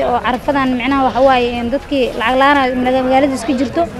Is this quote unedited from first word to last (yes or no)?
yes